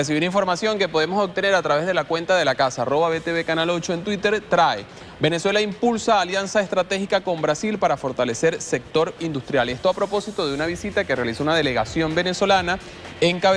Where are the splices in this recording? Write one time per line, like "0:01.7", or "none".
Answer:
0:10.4